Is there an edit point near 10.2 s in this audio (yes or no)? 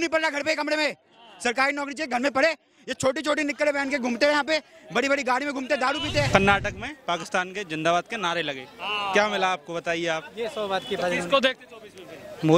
no